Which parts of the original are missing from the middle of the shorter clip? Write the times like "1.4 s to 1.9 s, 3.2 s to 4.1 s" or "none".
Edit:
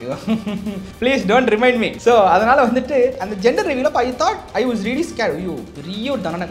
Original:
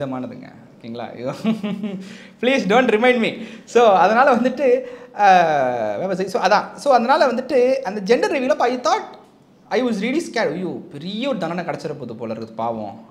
2.0 s to 2.3 s, 3.3 s to 3.6 s, 5.0 s to 7.9 s, 9.1 s to 9.6 s